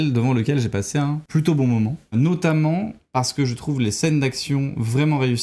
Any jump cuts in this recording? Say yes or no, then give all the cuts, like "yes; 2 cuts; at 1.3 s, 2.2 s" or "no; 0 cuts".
yes; 2 cuts; at 1.2 s, 2.1 s